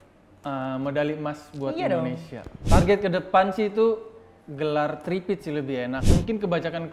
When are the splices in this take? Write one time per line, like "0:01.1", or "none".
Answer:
0:02.5
0:06.0